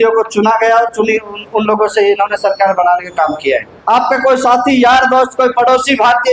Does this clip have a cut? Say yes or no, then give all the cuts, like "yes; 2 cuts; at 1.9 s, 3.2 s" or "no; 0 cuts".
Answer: yes; 1 cut; at 3.7 s